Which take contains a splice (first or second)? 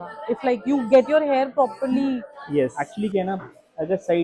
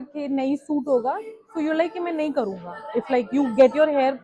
first